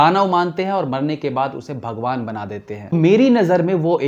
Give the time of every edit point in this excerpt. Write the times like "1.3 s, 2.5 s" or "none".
2.9 s